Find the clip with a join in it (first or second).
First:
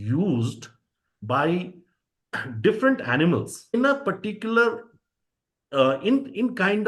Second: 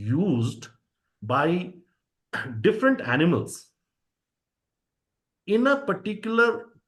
first